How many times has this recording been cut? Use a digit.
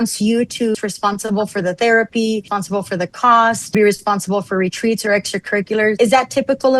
4